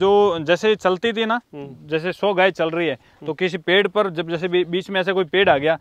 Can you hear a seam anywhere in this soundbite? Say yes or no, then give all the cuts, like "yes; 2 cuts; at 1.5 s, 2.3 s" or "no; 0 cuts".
no; 0 cuts